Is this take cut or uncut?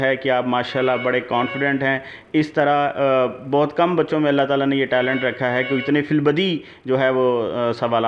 uncut